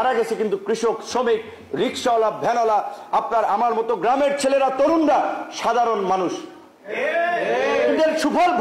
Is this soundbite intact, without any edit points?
yes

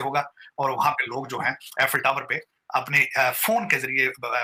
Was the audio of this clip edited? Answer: no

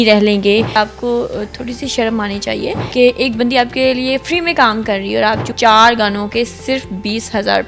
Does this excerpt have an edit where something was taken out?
yes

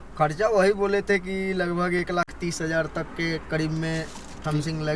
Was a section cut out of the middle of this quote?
no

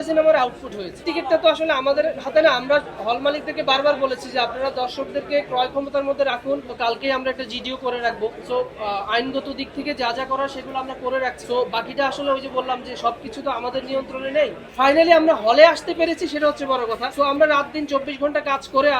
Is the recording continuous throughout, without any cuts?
no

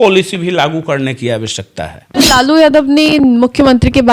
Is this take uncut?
no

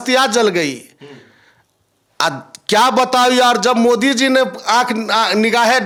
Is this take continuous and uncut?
yes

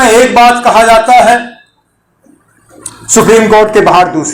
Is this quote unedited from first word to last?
yes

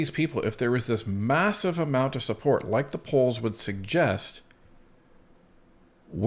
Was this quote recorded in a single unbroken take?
yes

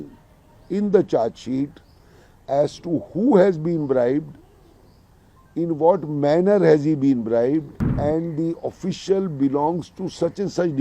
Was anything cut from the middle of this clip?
yes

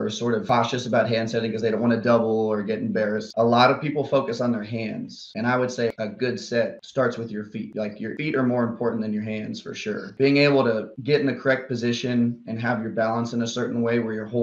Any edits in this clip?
yes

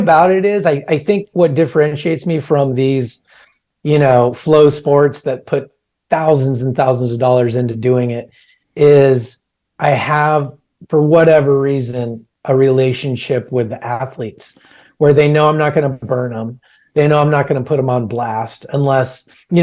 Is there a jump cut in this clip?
no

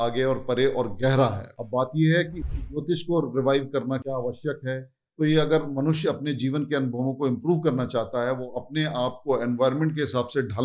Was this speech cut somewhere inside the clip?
no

